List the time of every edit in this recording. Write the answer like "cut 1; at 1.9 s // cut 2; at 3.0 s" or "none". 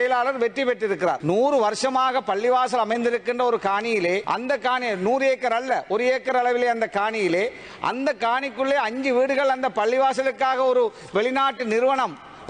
none